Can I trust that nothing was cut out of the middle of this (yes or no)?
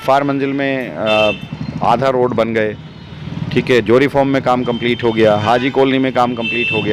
yes